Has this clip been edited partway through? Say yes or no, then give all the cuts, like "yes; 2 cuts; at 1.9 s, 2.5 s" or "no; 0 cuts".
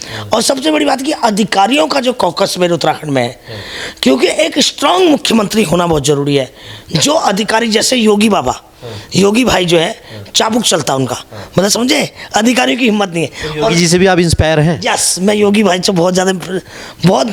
no; 0 cuts